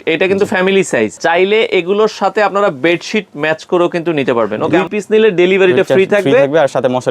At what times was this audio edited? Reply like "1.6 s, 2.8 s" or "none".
1.2 s, 4.7 s